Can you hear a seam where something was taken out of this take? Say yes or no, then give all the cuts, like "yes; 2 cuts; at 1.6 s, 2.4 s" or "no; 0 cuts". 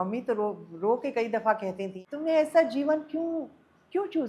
yes; 1 cut; at 1.9 s